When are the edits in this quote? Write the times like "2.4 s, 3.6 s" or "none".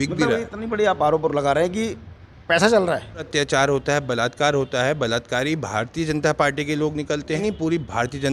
3.3 s, 7.4 s